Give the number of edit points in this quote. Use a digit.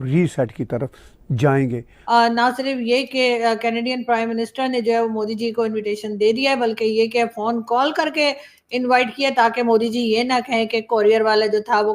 1